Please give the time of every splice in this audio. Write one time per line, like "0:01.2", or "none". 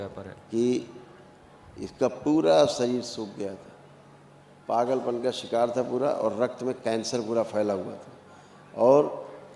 none